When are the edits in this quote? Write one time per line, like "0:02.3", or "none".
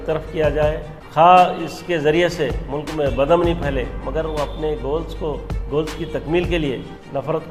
none